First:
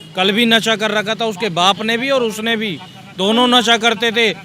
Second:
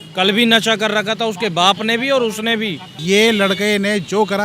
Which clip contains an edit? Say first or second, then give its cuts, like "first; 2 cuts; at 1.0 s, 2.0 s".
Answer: second; 1 cut; at 2.9 s